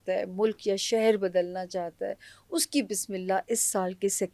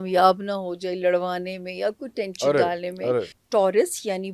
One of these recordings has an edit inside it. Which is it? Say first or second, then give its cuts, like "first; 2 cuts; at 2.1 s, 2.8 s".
second; 1 cut; at 3.4 s